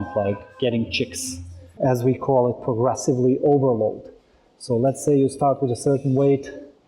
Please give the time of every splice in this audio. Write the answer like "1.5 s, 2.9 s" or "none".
1.7 s